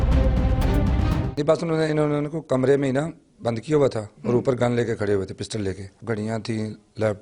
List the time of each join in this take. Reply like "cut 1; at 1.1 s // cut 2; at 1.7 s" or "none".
cut 1; at 1.3 s // cut 2; at 5.9 s